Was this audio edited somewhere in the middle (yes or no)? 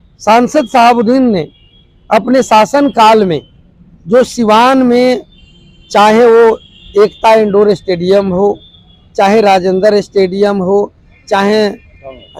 no